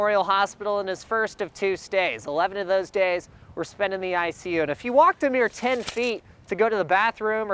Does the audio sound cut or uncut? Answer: uncut